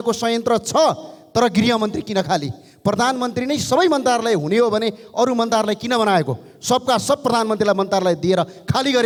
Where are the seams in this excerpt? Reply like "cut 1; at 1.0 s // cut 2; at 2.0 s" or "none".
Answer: none